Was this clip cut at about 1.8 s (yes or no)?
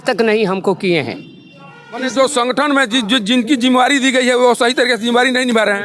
yes